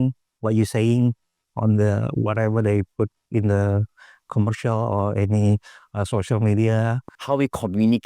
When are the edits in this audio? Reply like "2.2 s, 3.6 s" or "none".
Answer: 7.1 s